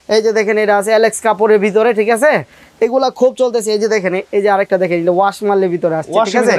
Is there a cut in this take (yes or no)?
no